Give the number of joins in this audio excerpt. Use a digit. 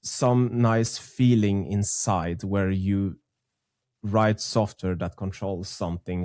0